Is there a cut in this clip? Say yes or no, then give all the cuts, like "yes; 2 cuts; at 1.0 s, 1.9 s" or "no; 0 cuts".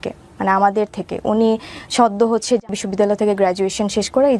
yes; 1 cut; at 2.8 s